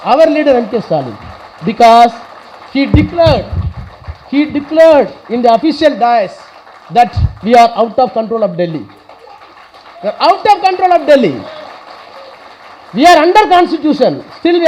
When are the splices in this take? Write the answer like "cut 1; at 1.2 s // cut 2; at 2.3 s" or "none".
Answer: none

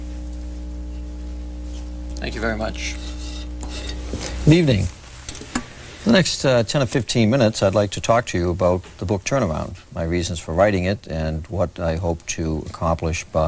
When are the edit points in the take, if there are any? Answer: cut 1; at 6.1 s

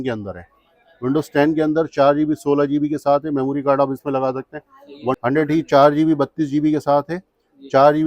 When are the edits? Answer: cut 1; at 5.2 s

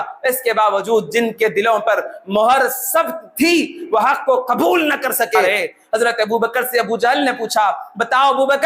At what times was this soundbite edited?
cut 1; at 5.4 s

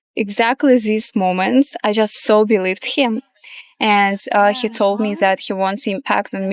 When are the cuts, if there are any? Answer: none

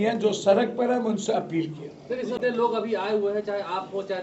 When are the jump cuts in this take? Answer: cut 1; at 2.3 s

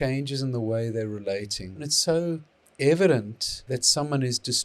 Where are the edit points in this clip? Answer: cut 1; at 1.9 s // cut 2; at 3.6 s

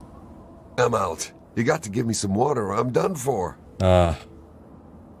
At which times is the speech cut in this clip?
cut 1; at 1.3 s // cut 2; at 3.6 s

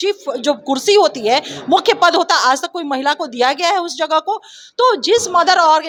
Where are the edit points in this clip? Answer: none

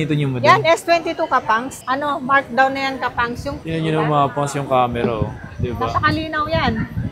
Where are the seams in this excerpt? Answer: none

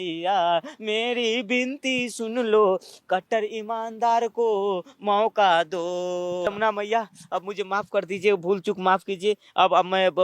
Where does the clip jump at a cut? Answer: cut 1; at 6.5 s

